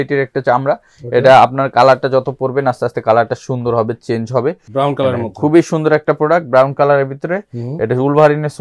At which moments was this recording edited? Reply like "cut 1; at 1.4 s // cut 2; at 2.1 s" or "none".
cut 1; at 4.6 s